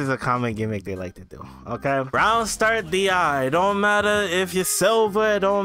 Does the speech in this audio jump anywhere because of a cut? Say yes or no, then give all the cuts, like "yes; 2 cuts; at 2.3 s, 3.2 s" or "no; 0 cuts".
yes; 1 cut; at 2.1 s